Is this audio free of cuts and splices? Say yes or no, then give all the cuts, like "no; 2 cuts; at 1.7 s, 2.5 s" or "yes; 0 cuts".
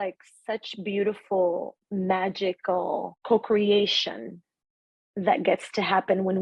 no; 2 cuts; at 1.8 s, 3.1 s